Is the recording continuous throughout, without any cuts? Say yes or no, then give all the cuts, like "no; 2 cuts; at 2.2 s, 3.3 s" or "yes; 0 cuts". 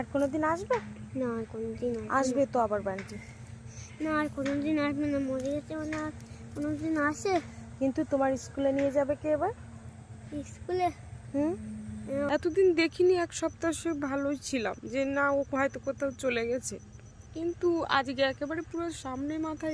no; 1 cut; at 12.3 s